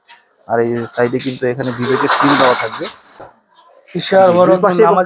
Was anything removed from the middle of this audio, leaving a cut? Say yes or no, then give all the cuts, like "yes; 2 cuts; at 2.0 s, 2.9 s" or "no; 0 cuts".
yes; 1 cut; at 3.2 s